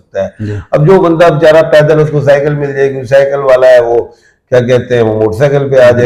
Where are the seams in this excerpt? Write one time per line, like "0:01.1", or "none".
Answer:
none